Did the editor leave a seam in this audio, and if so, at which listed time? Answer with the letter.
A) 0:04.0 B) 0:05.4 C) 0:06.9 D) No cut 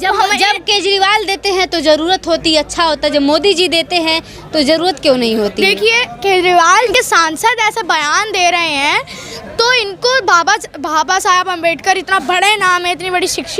C